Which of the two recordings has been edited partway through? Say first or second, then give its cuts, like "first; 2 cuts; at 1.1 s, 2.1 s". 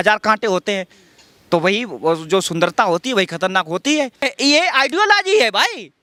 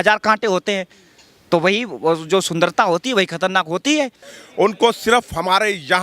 second; 1 cut; at 4.3 s